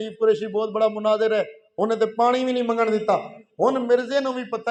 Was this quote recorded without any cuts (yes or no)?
yes